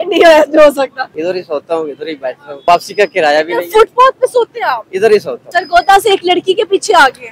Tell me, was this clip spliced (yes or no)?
yes